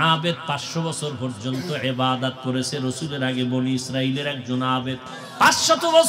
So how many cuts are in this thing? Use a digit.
1